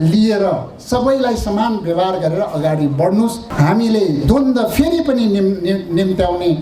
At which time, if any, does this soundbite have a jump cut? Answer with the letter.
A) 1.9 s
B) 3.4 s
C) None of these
B